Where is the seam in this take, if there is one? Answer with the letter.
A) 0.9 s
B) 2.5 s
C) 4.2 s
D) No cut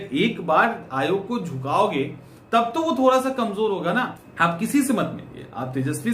C